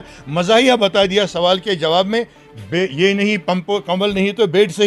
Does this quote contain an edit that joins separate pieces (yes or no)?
no